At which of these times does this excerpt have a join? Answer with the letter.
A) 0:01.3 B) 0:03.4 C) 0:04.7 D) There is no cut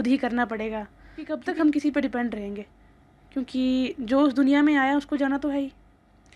A